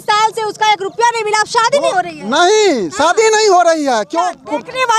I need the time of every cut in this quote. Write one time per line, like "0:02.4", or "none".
none